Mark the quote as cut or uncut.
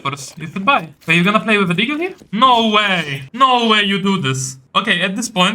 cut